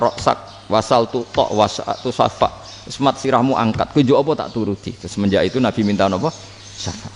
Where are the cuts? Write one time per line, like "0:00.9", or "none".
none

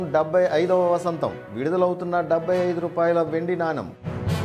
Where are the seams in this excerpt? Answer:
none

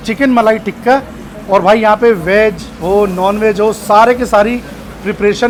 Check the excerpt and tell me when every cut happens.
none

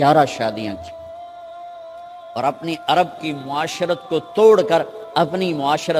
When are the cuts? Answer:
0:00.8
0:02.1

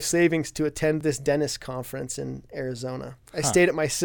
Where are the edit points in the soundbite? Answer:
0:01.0

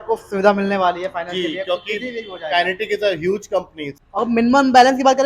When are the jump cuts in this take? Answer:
0:03.8

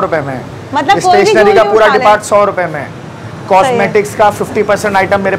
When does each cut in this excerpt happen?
none

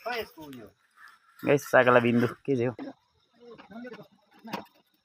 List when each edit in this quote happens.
0:02.9

